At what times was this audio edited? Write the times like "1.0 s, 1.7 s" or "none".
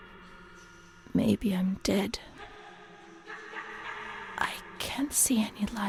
none